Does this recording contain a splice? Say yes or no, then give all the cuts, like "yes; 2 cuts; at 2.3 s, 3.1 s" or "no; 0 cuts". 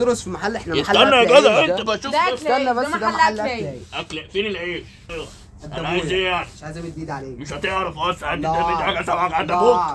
no; 0 cuts